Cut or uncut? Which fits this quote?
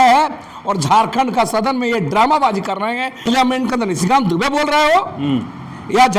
cut